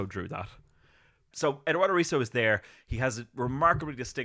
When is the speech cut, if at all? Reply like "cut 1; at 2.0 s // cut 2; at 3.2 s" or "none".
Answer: cut 1; at 1.3 s

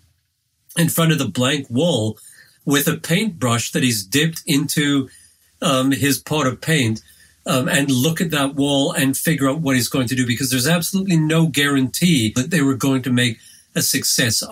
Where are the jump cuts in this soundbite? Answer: cut 1; at 12.4 s

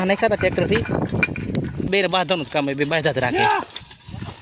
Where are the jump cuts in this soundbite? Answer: cut 1; at 1.9 s

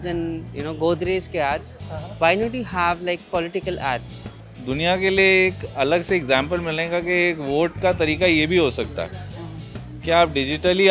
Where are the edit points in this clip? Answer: none

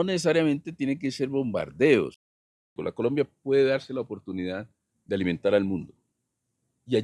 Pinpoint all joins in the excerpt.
cut 1; at 2.6 s

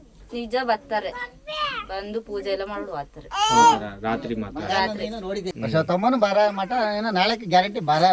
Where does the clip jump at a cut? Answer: cut 1; at 5.5 s

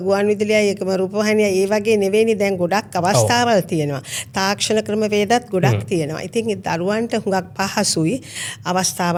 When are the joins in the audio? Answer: none

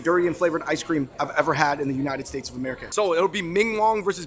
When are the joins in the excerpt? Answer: cut 1; at 1.2 s // cut 2; at 2.8 s

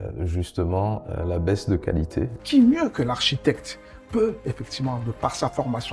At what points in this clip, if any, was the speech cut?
cut 1; at 2.4 s

